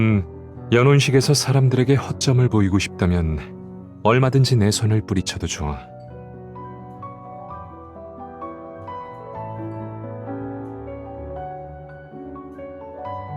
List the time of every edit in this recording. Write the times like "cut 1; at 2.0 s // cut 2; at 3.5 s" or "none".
cut 1; at 5.8 s